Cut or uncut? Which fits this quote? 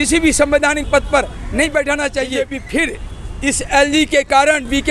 cut